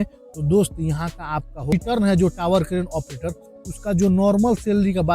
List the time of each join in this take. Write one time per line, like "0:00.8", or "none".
0:01.7